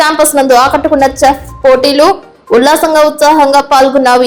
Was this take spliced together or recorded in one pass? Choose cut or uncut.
uncut